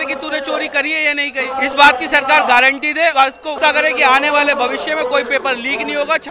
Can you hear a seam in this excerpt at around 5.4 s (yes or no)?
no